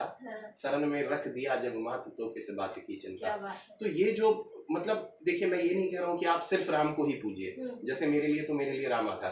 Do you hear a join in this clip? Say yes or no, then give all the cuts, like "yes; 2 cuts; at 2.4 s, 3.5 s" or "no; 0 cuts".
no; 0 cuts